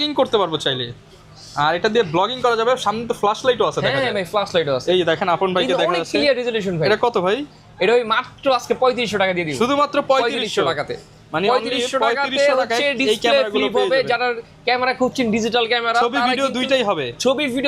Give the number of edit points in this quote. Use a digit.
0